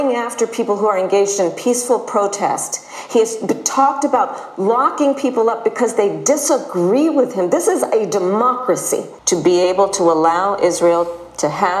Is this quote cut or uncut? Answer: cut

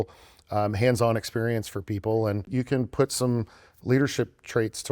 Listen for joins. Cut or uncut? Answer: cut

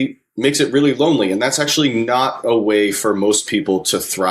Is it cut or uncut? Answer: uncut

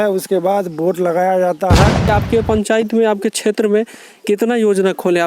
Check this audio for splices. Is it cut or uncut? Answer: cut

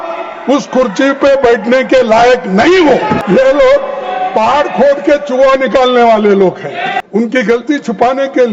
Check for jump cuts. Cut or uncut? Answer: cut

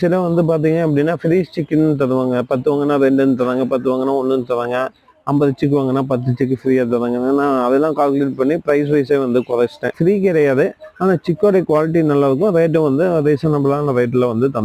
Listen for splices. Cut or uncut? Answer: cut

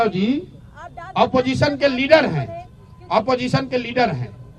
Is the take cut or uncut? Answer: uncut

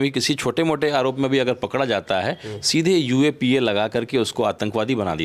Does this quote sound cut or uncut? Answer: uncut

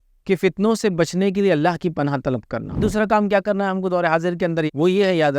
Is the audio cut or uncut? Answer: cut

